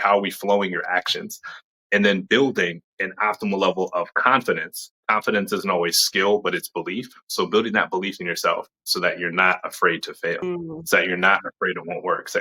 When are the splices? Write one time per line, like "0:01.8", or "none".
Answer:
0:10.4